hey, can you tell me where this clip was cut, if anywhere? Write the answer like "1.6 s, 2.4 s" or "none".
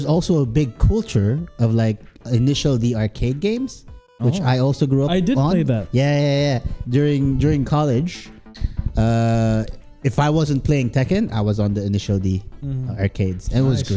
none